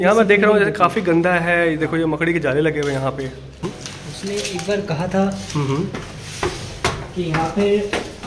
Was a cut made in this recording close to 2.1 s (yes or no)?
no